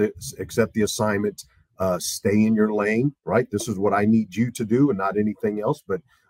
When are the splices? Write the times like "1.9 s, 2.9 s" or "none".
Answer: none

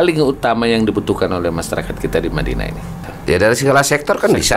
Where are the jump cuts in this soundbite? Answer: 3.1 s

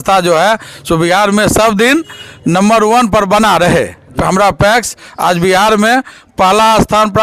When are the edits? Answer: 4.1 s

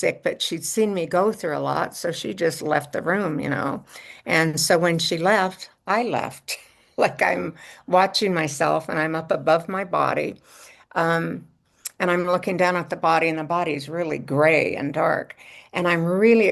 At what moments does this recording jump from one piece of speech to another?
none

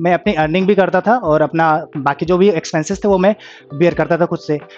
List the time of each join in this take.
none

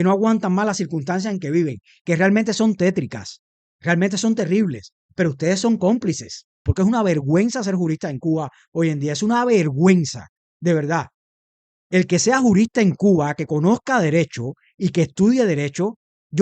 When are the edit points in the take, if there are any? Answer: 6.7 s

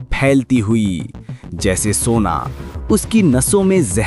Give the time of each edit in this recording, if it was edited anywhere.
none

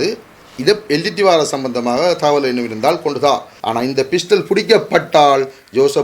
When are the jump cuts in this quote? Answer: 3.5 s

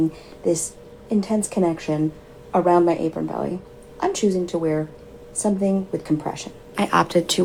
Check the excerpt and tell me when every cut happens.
none

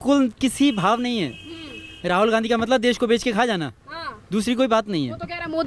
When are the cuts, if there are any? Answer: none

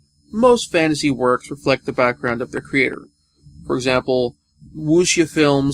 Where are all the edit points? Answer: 1.4 s

